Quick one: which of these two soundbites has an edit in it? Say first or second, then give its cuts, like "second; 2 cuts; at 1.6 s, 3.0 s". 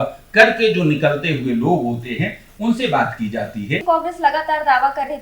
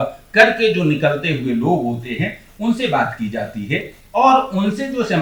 first; 1 cut; at 3.8 s